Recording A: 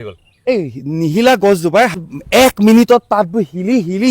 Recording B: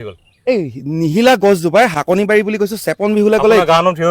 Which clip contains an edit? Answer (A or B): A